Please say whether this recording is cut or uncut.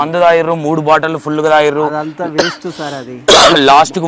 uncut